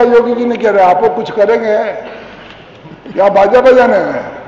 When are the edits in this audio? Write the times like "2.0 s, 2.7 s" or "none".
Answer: none